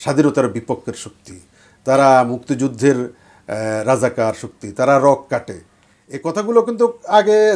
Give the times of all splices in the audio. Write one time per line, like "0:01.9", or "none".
none